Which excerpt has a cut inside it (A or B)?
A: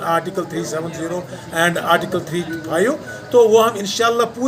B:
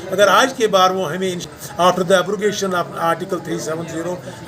B